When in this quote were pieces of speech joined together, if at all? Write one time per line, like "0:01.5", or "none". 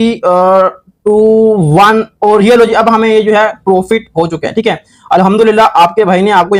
none